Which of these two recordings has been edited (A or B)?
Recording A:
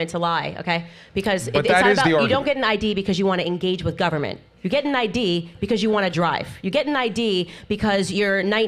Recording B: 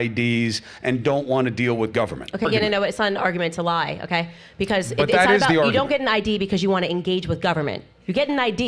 B